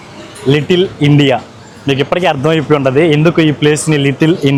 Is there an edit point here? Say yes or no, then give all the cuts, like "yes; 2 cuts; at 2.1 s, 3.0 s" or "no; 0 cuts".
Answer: no; 0 cuts